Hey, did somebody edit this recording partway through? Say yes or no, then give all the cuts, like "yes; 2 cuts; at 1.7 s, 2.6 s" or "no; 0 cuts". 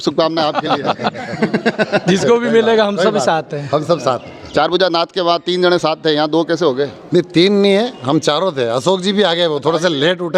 no; 0 cuts